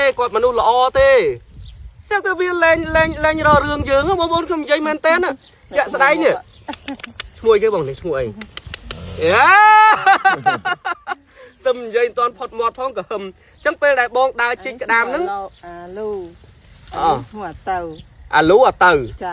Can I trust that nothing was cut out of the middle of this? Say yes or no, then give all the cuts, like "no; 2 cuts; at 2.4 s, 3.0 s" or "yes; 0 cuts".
yes; 0 cuts